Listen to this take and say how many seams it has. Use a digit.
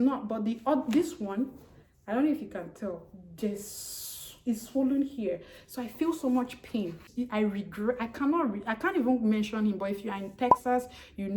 1